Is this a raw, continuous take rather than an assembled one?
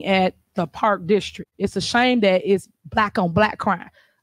no; 1 cut; at 1.4 s

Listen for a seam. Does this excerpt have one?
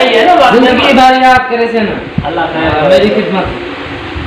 no; 0 cuts

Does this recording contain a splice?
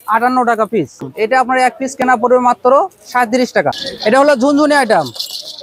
yes; 2 cuts; at 1.0 s, 3.9 s

